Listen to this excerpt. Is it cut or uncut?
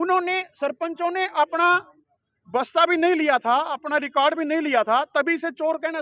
uncut